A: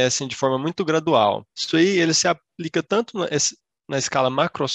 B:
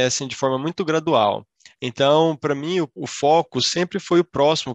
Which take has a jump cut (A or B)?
A